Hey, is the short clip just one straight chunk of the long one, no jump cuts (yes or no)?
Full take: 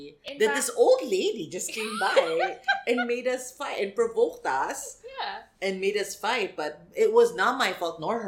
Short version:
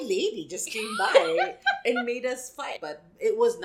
no